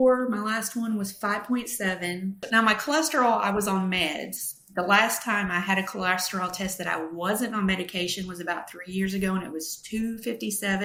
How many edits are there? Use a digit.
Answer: 0